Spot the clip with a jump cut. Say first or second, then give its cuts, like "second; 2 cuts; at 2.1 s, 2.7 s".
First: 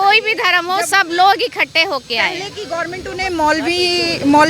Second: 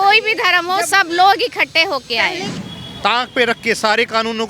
second; 1 cut; at 2.5 s